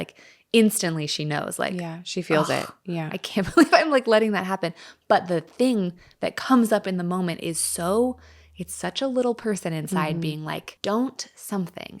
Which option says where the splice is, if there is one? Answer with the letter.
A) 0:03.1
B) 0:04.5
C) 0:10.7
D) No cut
C